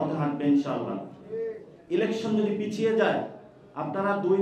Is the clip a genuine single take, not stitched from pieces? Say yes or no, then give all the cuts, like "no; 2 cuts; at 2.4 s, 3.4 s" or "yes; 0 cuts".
no; 1 cut; at 1.7 s